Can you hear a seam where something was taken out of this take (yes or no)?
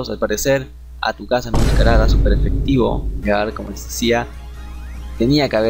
yes